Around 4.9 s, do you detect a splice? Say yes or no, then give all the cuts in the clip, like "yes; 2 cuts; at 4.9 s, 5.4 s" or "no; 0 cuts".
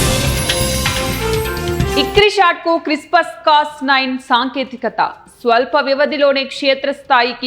no; 1 cut; at 1.9 s